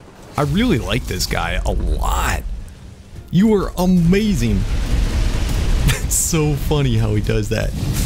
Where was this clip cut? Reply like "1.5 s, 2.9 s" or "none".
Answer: 3.2 s